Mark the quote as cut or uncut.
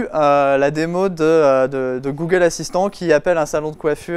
uncut